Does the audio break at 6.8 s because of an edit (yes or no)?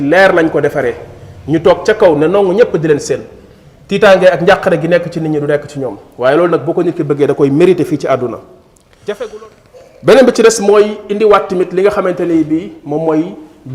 no